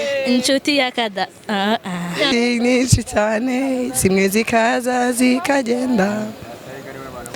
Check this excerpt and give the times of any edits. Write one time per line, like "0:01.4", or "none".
0:02.3